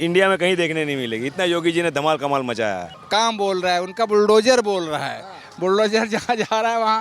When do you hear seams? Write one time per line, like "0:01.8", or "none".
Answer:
0:02.9